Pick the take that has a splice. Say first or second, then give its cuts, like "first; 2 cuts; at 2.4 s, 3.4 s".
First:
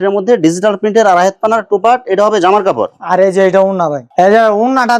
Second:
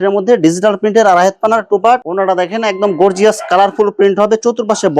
second; 1 cut; at 2.0 s